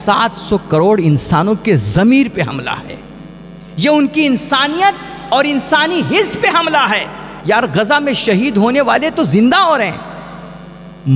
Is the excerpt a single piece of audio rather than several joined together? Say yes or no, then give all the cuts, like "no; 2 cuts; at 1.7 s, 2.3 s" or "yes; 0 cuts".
yes; 0 cuts